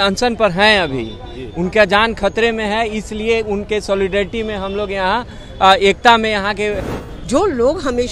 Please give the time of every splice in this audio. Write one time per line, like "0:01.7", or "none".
0:06.8